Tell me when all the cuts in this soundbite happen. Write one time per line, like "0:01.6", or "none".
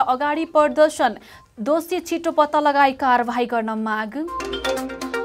0:04.3